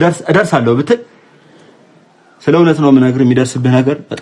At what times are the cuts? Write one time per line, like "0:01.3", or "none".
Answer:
none